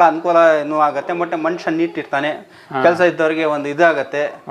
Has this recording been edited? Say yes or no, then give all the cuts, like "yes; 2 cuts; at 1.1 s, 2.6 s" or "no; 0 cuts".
no; 0 cuts